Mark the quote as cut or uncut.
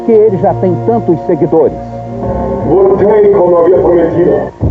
uncut